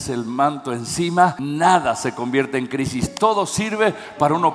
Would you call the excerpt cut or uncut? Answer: cut